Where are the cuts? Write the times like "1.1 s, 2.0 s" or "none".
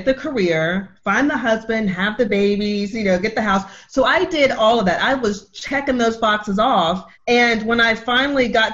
7.1 s